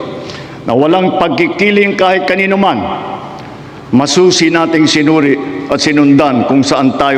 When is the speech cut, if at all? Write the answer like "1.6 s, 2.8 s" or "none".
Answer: none